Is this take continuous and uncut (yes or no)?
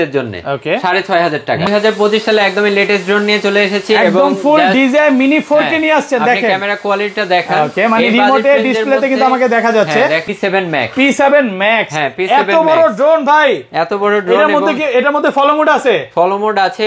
no